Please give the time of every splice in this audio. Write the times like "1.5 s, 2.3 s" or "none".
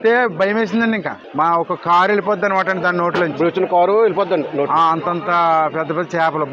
1.2 s